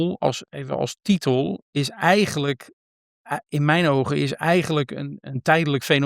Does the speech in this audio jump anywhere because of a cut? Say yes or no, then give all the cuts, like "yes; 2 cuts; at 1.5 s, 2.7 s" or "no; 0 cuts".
no; 0 cuts